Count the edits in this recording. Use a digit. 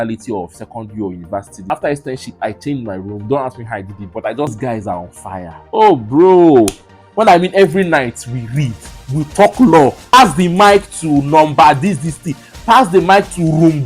3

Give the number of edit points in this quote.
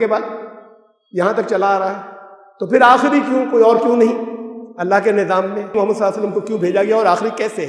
1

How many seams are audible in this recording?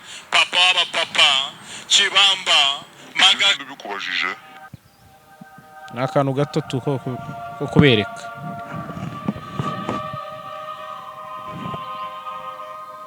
1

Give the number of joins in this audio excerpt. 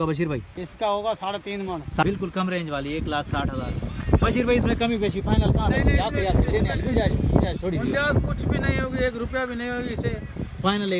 1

